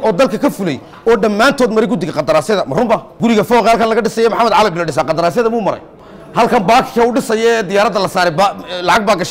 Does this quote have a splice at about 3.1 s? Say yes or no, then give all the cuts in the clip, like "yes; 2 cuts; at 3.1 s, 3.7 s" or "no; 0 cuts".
yes; 1 cut; at 3.1 s